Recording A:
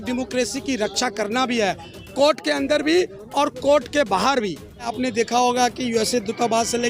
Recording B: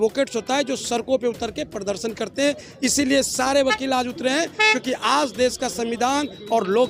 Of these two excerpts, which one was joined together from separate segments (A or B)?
A